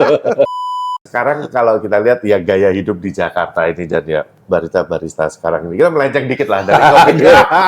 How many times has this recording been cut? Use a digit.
1